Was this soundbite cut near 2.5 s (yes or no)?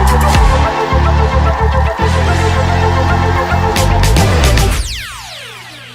no